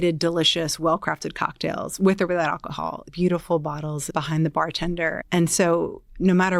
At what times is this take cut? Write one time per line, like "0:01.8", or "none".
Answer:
0:03.0